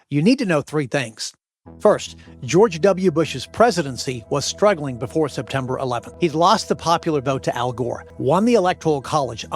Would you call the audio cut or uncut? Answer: cut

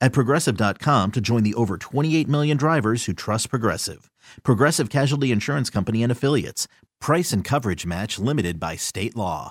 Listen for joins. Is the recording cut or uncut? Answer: uncut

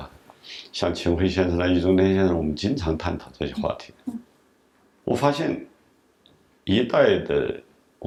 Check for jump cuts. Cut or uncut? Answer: uncut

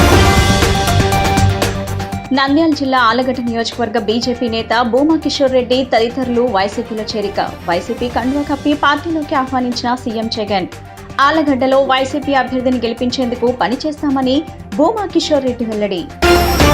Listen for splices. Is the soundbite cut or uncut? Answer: cut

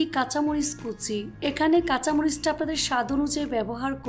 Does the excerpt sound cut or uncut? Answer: uncut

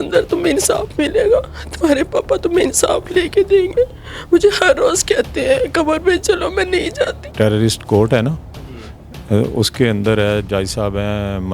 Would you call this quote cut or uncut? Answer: cut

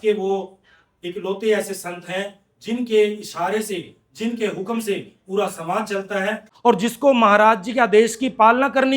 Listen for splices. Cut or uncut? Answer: cut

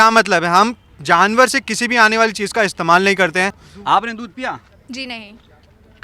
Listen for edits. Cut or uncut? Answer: uncut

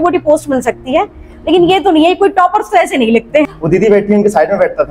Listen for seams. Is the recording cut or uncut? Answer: cut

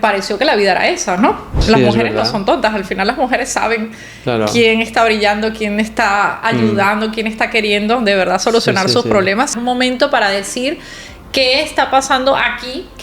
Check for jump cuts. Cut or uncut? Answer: cut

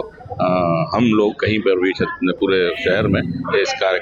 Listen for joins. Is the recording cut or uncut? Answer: uncut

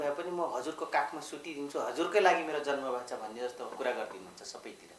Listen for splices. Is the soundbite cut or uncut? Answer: uncut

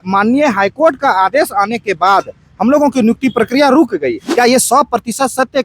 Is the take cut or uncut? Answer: cut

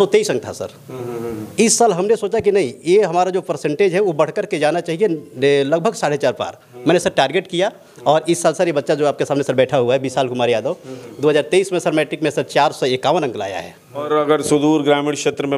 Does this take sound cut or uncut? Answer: cut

